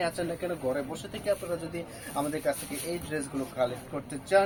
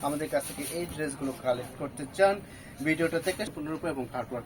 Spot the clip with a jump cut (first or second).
second